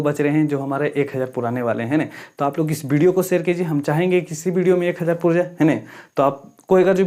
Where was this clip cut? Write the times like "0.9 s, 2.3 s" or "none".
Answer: none